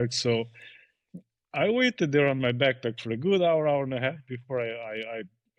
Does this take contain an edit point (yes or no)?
no